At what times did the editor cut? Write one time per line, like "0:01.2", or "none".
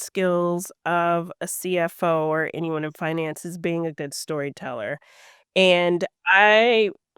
none